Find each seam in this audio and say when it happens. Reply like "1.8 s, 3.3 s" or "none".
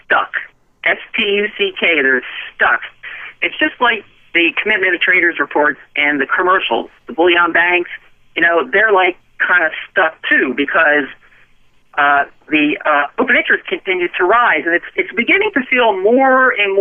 none